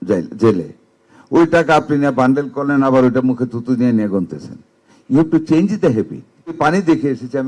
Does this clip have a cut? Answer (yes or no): yes